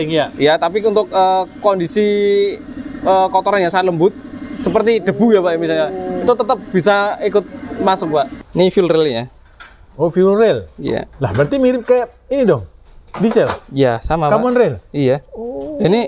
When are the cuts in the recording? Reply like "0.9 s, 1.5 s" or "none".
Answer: 8.4 s